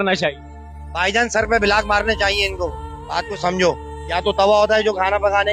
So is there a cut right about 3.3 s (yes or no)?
no